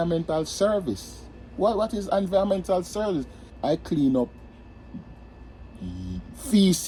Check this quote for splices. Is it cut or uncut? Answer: uncut